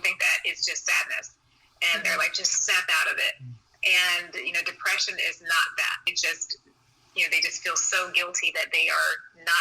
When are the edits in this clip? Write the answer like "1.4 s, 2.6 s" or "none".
6.1 s